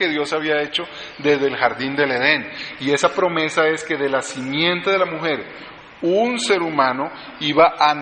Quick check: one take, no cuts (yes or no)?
no